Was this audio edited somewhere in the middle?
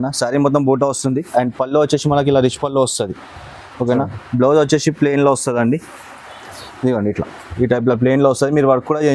no; 0 cuts

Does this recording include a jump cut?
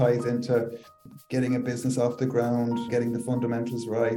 yes; 2 cuts; at 1.0 s, 2.9 s

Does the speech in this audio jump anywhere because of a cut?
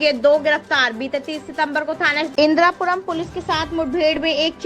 yes; 1 cut; at 2.3 s

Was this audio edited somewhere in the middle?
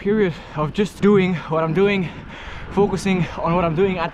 yes; 1 cut; at 0.9 s

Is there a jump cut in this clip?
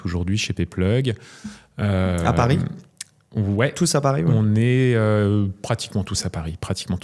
no; 0 cuts

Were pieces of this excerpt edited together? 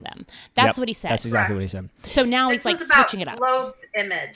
no; 0 cuts

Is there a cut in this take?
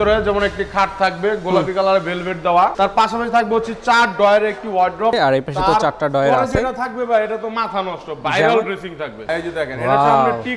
yes; 2 cuts; at 2.7 s, 5.1 s

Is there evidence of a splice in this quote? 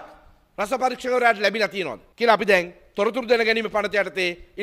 yes; 1 cut; at 2.0 s

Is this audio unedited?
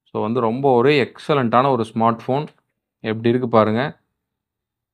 yes; 0 cuts

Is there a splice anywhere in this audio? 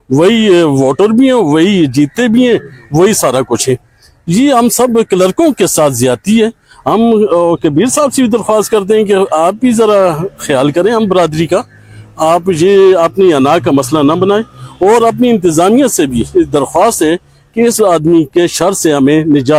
no; 0 cuts

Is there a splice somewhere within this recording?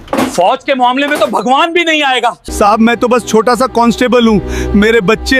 yes; 1 cut; at 2.5 s

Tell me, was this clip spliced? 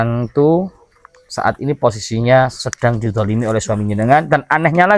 no; 0 cuts

